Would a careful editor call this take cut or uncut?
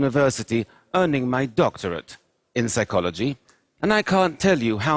uncut